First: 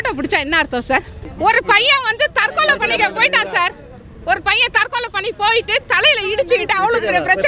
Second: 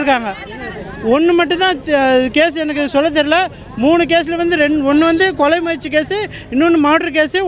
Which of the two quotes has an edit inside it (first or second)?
first